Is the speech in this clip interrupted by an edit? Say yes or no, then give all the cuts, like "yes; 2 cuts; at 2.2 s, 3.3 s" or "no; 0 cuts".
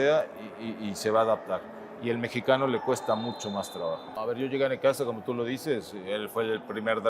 yes; 1 cut; at 4.2 s